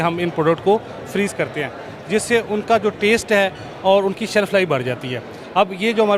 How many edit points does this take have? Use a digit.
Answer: 0